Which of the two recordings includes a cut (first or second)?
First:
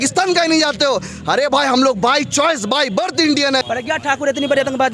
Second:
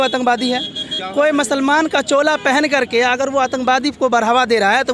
first